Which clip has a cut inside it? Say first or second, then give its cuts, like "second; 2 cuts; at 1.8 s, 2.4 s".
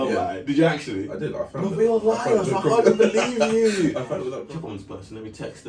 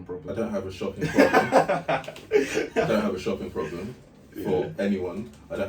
first; 1 cut; at 4.4 s